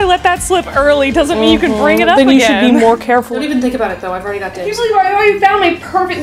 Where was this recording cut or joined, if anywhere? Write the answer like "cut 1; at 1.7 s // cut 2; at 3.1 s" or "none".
cut 1; at 2.2 s // cut 2; at 3.3 s // cut 3; at 4.7 s

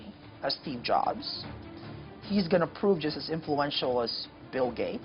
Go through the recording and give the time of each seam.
none

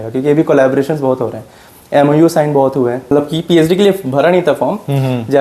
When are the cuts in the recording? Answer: cut 1; at 3.1 s

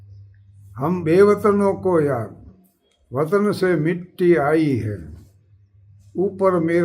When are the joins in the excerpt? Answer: cut 1; at 1.0 s

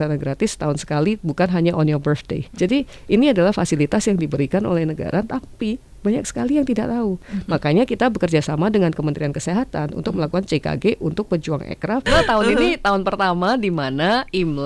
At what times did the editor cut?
cut 1; at 2.5 s // cut 2; at 7.3 s // cut 3; at 12.1 s

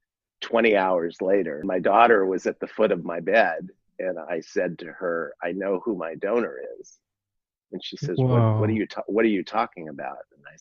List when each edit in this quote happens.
cut 1; at 1.7 s

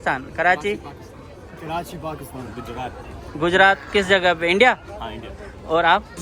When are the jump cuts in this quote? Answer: none

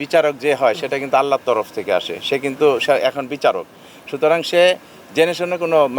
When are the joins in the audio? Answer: none

